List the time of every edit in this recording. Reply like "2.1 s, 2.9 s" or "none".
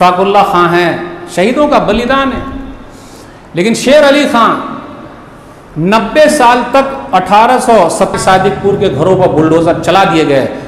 8.1 s